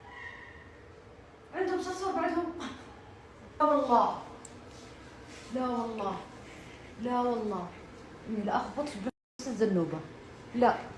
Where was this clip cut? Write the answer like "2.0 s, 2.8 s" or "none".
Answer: 3.6 s